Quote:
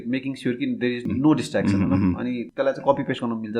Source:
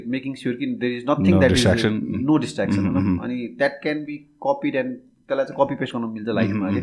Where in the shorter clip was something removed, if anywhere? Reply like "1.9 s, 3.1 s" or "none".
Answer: 1.0 s, 2.4 s